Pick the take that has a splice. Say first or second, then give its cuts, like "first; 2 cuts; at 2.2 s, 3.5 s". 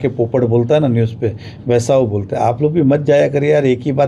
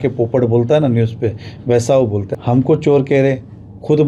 second; 1 cut; at 2.3 s